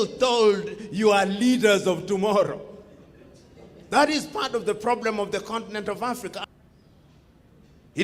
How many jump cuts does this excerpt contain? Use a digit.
1